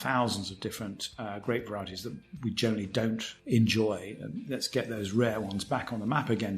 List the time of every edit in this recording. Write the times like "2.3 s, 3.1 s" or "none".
3.3 s